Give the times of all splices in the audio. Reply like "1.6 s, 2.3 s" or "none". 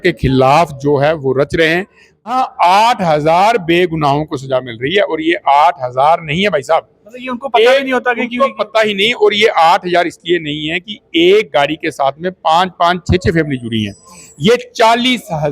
2.3 s